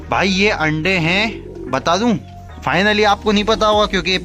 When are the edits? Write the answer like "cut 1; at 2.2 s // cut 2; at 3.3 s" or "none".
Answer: none